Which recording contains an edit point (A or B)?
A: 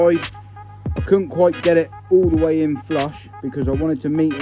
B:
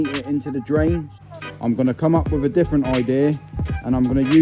B